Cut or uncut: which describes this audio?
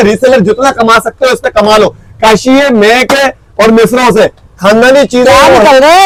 uncut